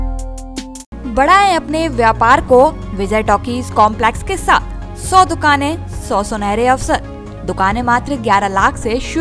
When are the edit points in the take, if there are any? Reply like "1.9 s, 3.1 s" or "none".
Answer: none